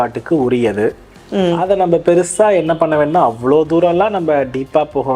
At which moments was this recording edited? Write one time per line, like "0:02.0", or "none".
none